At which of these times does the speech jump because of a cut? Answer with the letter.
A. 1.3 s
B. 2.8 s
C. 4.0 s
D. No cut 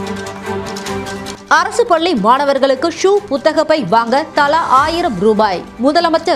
A